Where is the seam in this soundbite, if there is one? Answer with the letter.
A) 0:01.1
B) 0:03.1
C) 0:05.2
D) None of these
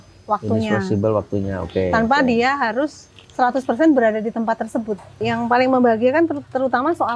C